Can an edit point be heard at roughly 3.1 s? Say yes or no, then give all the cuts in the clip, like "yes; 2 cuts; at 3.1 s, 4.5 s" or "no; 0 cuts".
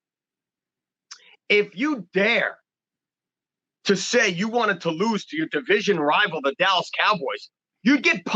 no; 0 cuts